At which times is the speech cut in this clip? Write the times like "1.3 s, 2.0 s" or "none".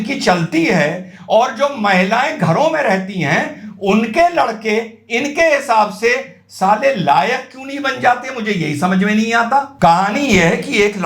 9.7 s